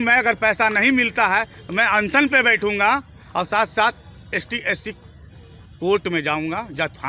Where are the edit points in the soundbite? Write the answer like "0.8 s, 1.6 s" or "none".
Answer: none